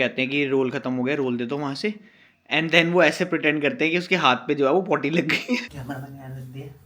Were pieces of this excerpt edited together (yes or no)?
yes